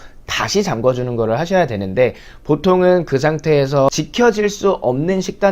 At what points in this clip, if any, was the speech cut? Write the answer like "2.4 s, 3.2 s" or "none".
3.6 s